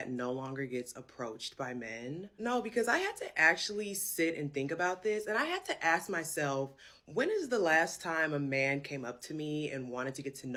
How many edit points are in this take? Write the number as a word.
zero